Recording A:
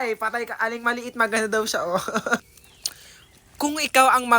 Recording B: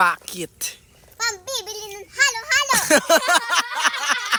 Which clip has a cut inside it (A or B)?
A